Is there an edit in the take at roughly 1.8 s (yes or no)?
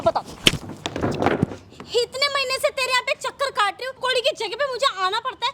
no